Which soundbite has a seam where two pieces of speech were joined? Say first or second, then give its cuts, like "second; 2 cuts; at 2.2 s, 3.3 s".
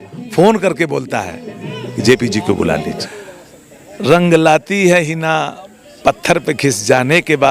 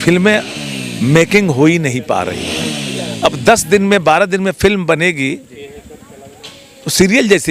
first; 1 cut; at 3.0 s